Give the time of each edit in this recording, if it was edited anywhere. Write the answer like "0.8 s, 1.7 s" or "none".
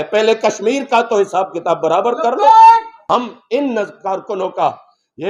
3.0 s